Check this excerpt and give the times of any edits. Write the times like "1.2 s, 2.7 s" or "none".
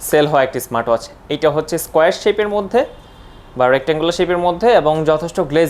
none